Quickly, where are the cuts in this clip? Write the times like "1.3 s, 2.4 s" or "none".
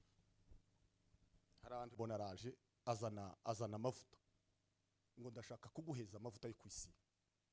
2.0 s